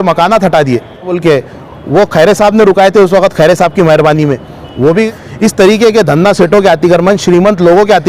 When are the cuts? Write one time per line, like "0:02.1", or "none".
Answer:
0:01.2
0:05.2